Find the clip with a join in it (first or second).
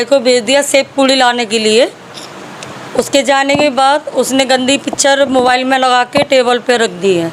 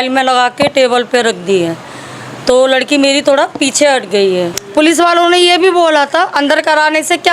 second